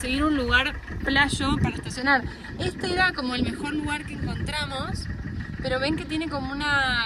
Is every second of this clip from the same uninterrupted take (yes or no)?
yes